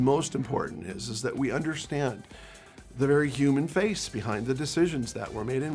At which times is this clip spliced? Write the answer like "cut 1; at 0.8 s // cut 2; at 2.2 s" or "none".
none

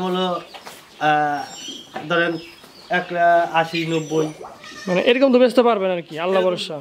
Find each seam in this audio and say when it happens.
none

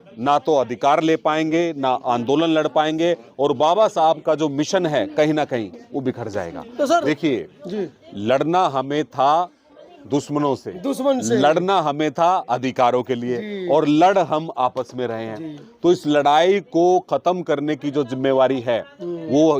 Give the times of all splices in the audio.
cut 1; at 7.0 s

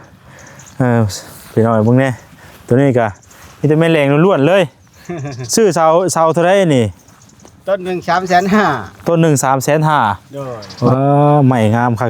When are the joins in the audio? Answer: cut 1; at 10.9 s

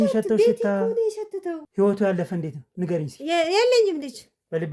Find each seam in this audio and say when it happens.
cut 1; at 1.6 s

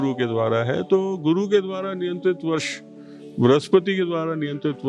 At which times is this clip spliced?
none

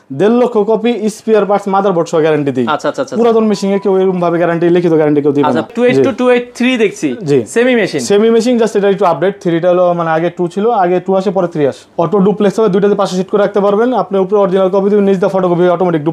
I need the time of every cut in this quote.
cut 1; at 5.7 s // cut 2; at 11.8 s

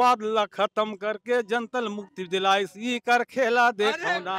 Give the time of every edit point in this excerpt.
none

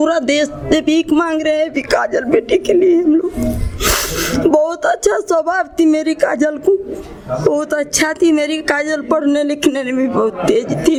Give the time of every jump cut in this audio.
none

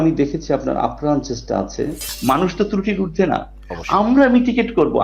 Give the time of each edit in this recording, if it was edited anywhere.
cut 1; at 2.1 s

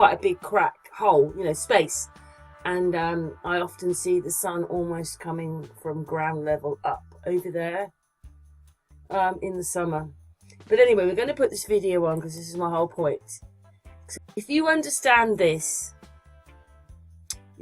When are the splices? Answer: cut 1; at 10.8 s

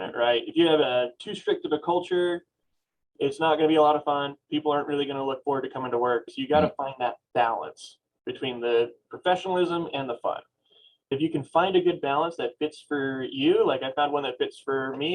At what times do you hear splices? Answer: cut 1; at 11.1 s

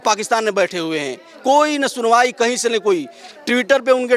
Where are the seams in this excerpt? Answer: none

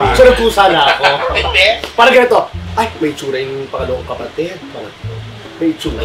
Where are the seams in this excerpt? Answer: none

